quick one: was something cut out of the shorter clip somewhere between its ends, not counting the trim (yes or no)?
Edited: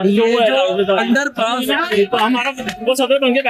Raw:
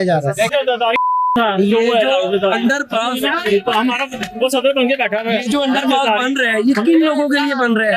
no